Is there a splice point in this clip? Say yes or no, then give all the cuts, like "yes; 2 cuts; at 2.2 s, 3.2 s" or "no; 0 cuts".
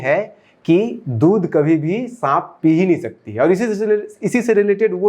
no; 0 cuts